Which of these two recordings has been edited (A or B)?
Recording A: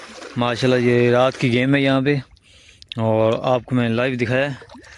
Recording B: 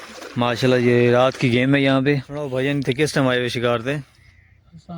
B